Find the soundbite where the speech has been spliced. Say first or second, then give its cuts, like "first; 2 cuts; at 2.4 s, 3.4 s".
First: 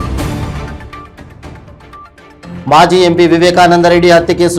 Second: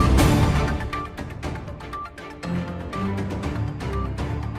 second; 1 cut; at 2.6 s